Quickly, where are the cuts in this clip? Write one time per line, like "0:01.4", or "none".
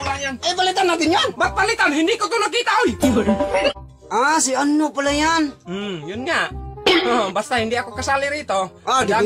0:03.7